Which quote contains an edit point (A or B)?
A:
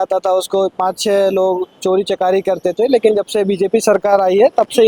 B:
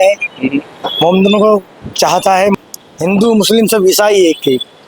B